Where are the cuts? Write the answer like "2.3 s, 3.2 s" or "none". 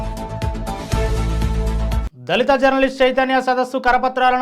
2.0 s